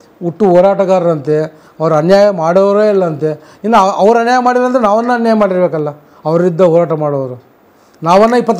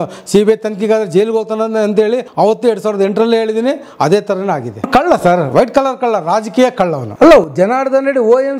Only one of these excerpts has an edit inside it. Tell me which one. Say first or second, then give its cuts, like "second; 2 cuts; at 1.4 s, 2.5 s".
second; 3 cuts; at 2.3 s, 4.9 s, 7.0 s